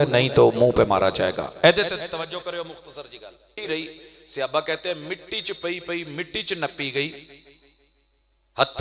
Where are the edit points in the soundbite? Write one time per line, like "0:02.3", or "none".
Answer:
0:03.6